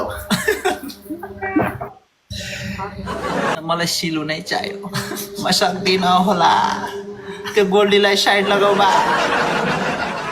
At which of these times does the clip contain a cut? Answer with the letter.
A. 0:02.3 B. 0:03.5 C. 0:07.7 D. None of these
B